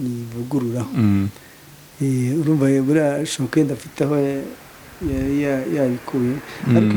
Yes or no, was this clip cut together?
no